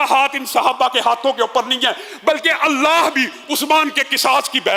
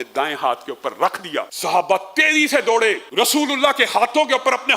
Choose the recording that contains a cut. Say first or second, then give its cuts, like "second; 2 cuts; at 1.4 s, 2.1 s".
second; 2 cuts; at 1.5 s, 3.0 s